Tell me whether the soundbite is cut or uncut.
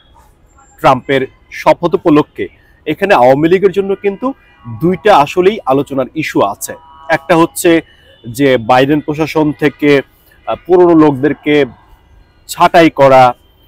uncut